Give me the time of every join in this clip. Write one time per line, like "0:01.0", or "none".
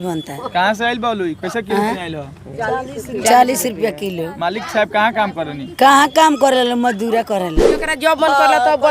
0:07.8